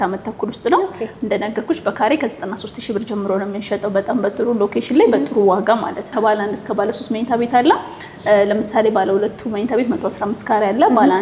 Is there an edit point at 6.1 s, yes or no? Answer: yes